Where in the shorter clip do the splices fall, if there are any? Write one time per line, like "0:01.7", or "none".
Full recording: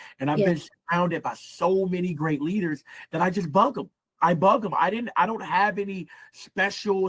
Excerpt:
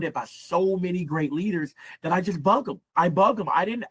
0:02.8